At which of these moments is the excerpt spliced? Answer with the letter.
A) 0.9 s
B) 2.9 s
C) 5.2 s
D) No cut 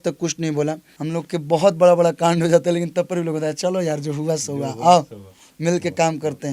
A